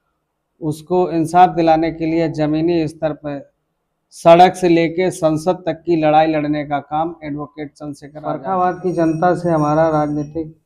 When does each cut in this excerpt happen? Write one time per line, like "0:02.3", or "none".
0:08.1